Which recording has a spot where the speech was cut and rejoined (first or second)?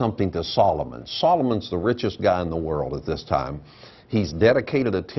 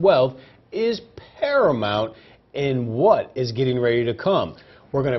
second